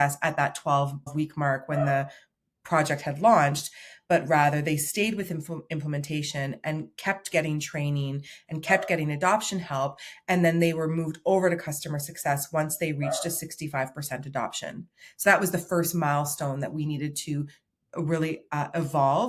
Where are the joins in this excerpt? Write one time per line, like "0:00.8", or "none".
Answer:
none